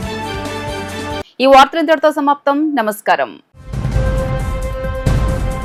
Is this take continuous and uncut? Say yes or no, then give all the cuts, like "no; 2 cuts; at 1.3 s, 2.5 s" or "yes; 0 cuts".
yes; 0 cuts